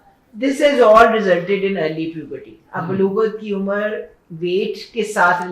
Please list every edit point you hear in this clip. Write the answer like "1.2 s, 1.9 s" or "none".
none